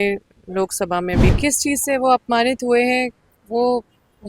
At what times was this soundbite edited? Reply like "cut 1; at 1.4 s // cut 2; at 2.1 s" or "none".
cut 1; at 1.3 s